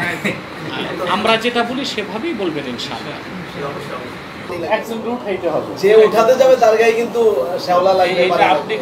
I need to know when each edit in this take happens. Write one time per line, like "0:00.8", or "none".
0:04.5

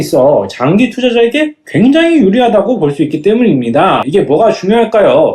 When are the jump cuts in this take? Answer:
0:04.0

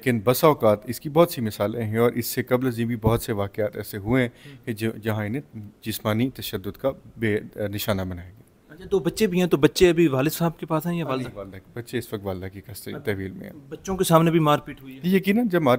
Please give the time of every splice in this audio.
none

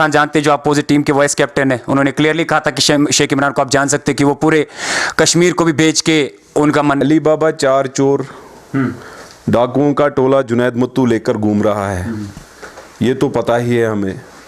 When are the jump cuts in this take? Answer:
0:07.0

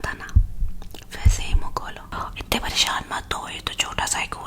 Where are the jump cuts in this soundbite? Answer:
0:02.1

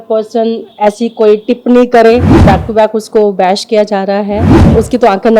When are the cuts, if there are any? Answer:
0:02.3
0:04.5

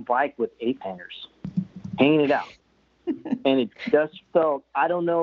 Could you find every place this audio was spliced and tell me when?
none

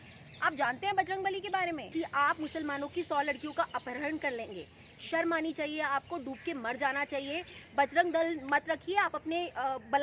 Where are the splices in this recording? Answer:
0:01.8

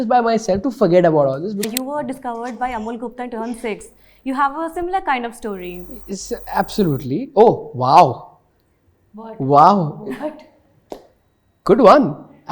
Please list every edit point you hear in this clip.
0:01.6

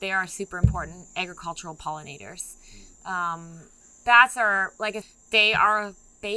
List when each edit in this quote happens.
0:05.0

